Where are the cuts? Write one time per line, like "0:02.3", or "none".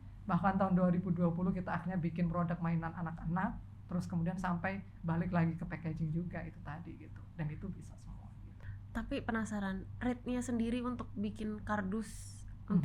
0:08.6

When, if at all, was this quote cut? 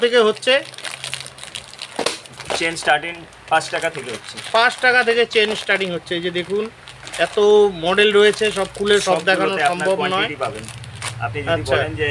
none

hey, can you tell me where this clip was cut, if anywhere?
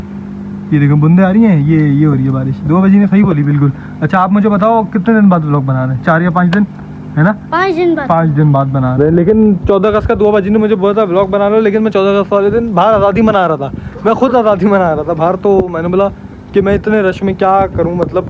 none

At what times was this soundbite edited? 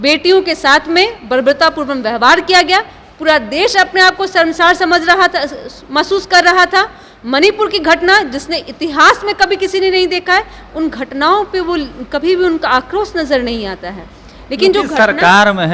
none

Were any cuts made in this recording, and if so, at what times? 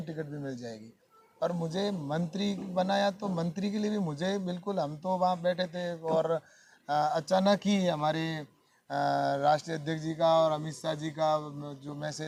none

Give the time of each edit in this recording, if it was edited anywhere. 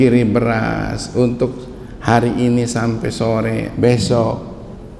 none

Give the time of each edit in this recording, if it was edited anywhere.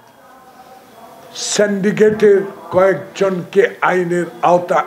none

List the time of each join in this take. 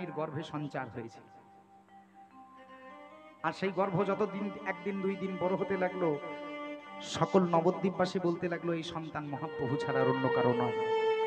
none

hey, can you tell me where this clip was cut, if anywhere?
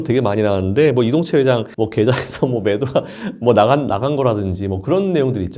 none

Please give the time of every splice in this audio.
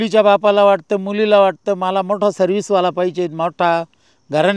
none

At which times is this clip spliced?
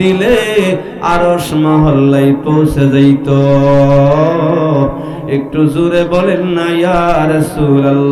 none

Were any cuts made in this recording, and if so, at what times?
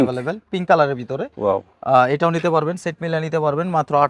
none

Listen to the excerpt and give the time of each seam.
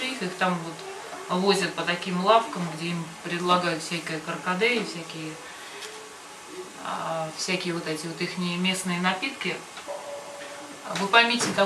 0:10.2

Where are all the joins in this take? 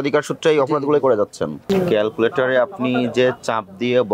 0:01.6

